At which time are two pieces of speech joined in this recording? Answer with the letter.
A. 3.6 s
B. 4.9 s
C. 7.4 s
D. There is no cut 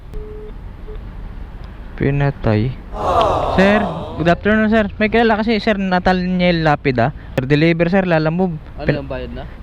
C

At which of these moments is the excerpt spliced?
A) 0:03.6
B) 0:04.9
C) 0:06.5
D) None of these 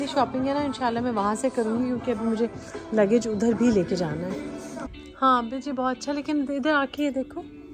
B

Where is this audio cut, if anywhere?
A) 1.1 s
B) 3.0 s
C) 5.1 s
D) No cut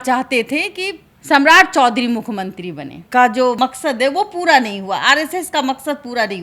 B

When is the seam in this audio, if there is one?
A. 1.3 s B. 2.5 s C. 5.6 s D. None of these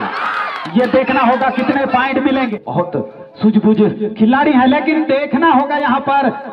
B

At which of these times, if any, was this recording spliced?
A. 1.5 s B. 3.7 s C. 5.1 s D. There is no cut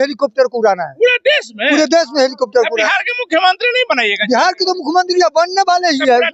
D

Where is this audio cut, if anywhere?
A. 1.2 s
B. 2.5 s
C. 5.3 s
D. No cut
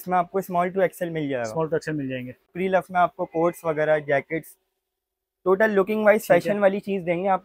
B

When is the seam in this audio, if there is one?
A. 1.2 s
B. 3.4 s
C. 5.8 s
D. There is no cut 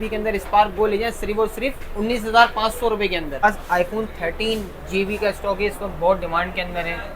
B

